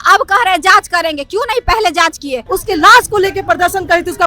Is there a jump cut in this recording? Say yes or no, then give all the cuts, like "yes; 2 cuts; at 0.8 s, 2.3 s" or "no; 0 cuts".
yes; 1 cut; at 2.4 s